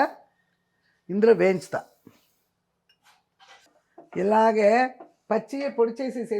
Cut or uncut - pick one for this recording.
cut